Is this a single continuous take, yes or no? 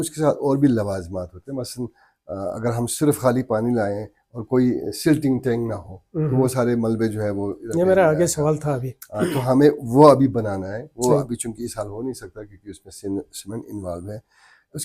yes